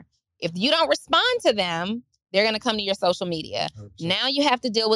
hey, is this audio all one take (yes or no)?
yes